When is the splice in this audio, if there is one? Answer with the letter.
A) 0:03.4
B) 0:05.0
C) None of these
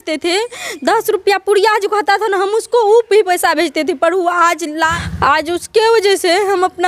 B